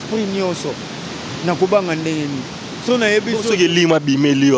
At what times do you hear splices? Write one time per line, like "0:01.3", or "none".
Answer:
none

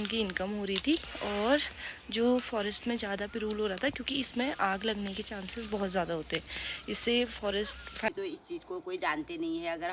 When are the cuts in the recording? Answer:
0:08.1

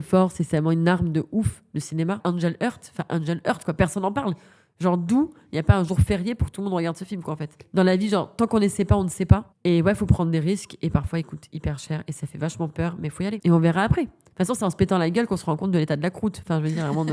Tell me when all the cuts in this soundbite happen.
0:02.2
0:07.6

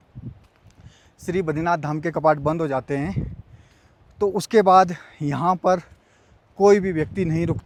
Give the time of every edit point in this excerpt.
none

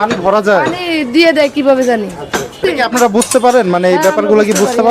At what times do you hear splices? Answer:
0:02.6

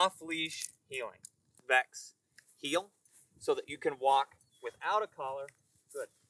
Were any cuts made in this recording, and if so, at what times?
0:01.5

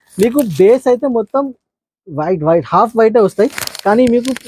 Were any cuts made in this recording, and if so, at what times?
none

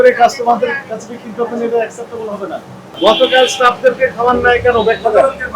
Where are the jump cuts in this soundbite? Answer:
0:02.9

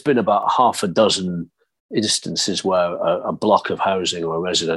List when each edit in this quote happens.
none

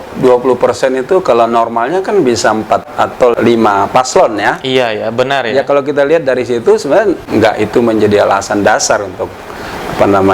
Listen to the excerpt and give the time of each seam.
0:02.9
0:07.2

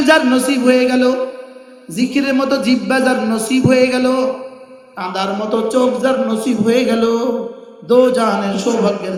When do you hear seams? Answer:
none

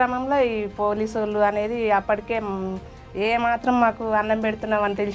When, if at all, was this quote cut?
none

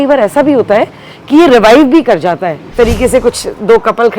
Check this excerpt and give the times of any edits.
0:02.7

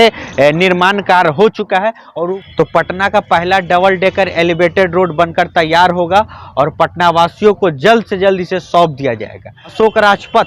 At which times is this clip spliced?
0:02.0
0:09.7

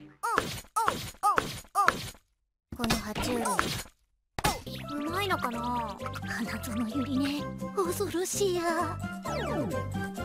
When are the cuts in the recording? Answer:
0:02.4

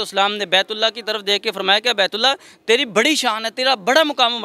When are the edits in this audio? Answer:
none

